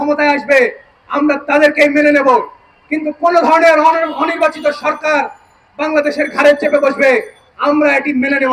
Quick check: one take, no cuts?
yes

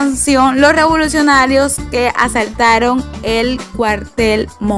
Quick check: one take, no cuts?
yes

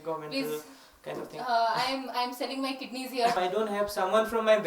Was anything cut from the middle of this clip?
yes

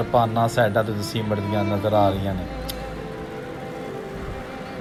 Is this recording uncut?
yes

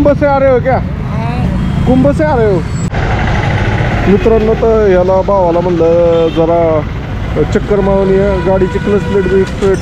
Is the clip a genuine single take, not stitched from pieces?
no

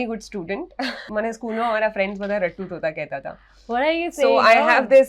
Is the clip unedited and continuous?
no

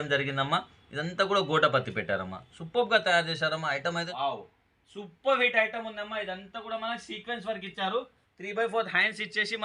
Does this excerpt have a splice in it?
yes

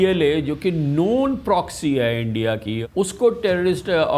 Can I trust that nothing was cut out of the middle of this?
no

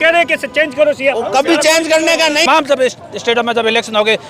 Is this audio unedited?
no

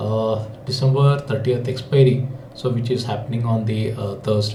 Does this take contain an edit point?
no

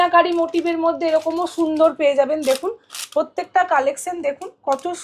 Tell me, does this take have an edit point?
no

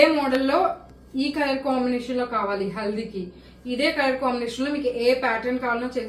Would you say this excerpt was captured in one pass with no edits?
yes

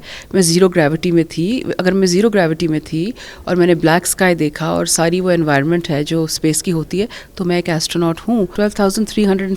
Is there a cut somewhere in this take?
yes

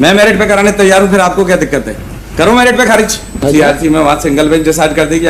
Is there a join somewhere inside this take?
yes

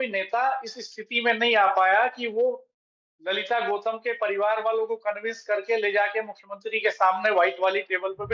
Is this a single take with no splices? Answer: yes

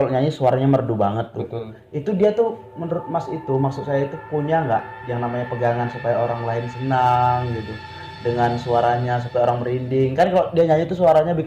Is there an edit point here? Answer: no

